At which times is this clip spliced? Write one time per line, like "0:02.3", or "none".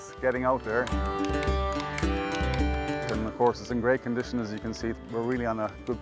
0:05.0